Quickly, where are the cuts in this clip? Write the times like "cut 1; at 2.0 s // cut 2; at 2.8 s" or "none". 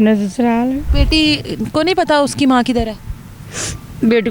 none